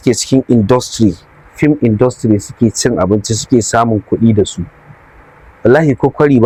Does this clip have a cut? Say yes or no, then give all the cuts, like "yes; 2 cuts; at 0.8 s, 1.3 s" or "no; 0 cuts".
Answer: no; 0 cuts